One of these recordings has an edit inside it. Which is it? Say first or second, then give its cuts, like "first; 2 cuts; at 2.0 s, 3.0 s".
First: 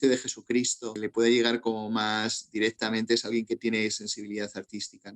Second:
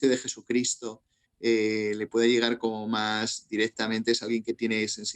first; 1 cut; at 1.0 s